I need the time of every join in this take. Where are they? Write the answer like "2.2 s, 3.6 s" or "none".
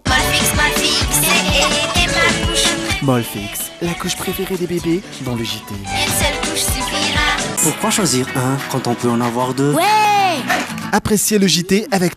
7.5 s